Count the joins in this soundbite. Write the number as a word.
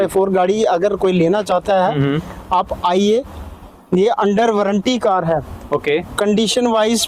zero